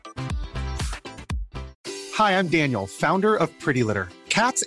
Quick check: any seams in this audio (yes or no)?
yes